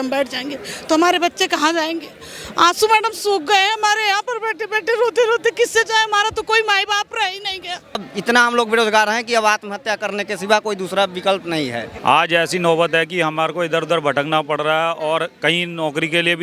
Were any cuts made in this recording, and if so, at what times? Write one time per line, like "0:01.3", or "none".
0:08.1
0:11.9